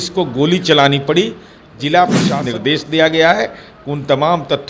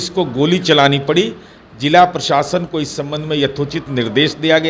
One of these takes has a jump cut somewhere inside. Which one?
first; 1 cut; at 2.3 s

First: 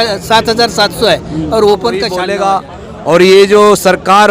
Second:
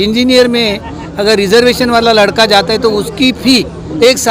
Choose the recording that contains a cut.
first; 1 cut; at 2.2 s

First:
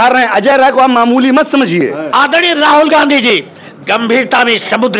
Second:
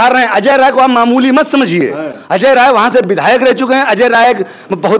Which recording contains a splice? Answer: first; 1 cut; at 2.0 s

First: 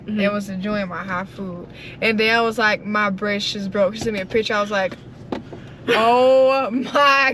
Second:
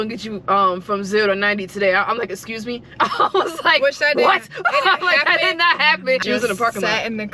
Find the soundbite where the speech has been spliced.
second; 1 cut; at 6.2 s

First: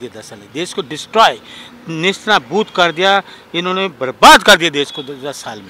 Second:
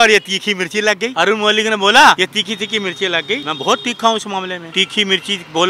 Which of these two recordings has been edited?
second; 4 cuts; at 1.1 s, 2.2 s, 3.5 s, 4.6 s

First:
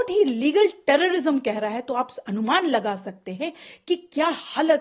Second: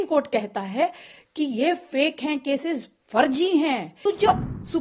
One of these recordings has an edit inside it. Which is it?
second; 1 cut; at 3.9 s

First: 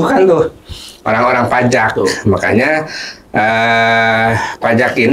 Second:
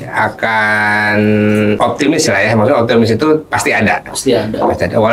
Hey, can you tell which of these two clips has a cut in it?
second; 1 cut; at 1.8 s

